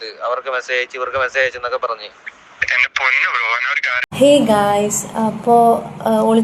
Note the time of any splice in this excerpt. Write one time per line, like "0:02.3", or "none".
0:04.0